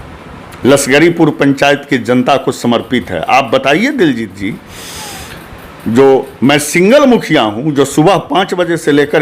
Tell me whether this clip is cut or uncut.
uncut